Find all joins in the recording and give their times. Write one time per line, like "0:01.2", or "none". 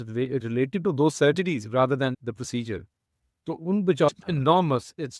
0:04.2